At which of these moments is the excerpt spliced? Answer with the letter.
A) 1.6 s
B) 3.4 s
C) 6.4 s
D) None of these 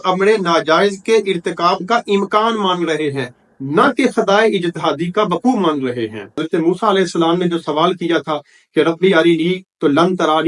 C